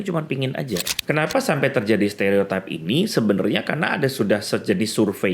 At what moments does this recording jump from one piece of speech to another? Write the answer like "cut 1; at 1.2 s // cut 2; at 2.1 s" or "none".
cut 1; at 0.9 s